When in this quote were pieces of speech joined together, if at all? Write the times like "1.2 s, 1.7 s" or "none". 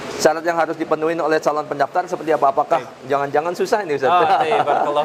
none